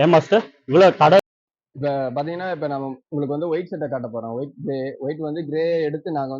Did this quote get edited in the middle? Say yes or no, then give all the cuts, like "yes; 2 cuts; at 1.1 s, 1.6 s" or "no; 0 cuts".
yes; 1 cut; at 1.2 s